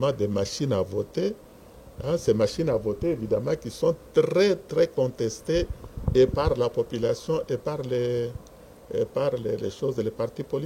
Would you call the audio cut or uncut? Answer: uncut